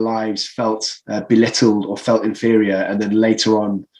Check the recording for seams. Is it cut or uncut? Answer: cut